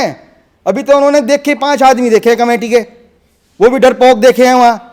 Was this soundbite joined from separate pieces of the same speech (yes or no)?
no